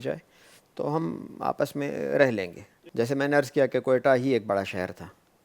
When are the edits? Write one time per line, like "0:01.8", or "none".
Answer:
0:02.6